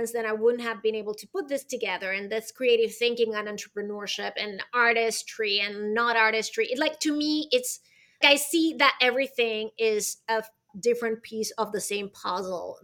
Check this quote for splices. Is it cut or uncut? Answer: cut